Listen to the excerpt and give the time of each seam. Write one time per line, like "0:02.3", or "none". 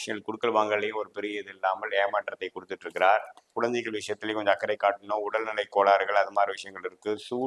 0:03.5